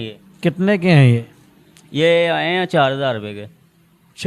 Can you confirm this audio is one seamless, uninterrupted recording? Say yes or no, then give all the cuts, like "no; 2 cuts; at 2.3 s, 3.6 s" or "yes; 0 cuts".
yes; 0 cuts